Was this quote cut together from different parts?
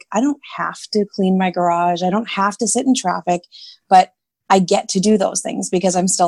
no; 0 cuts

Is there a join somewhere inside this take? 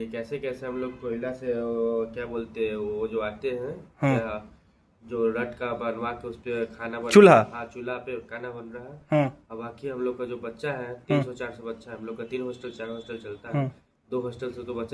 no; 0 cuts

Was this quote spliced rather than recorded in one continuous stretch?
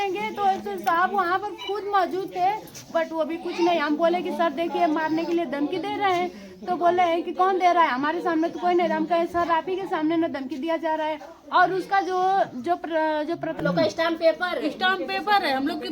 yes; 1 cut; at 13.6 s

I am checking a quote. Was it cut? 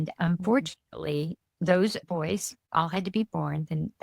yes; 1 cut; at 2.6 s

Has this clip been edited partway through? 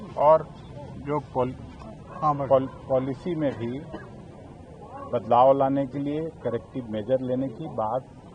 no; 0 cuts

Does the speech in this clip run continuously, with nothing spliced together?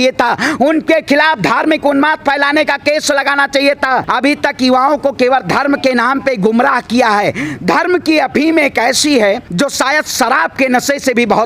no; 2 cuts; at 4.1 s, 9.5 s

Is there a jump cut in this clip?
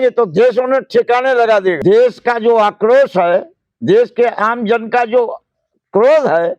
yes; 1 cut; at 1.8 s

